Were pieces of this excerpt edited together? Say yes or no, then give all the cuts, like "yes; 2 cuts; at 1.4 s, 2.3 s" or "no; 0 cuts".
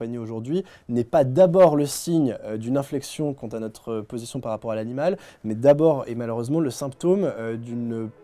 no; 0 cuts